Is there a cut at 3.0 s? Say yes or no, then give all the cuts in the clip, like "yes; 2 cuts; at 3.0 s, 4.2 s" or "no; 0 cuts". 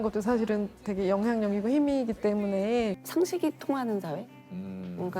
yes; 1 cut; at 3.0 s